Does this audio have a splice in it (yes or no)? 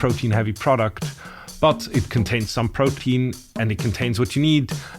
yes